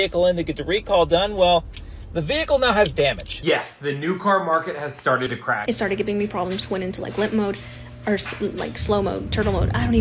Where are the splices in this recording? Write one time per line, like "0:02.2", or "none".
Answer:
0:03.4
0:05.6